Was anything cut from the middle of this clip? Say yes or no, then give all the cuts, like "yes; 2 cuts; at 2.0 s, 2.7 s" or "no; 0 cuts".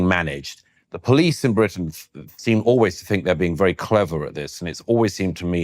no; 0 cuts